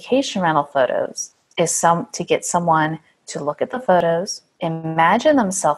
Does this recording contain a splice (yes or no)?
yes